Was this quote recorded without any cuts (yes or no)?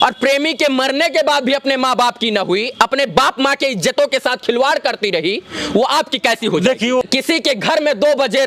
no